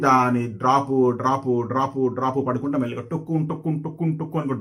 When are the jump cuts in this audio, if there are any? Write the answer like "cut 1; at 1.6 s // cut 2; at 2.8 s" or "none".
none